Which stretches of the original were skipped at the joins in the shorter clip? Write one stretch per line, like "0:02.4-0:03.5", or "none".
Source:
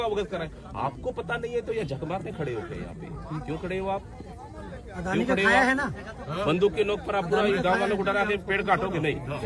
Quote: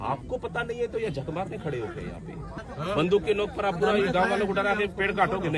0:03.3-0:06.1